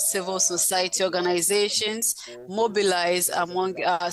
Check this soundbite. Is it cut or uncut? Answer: uncut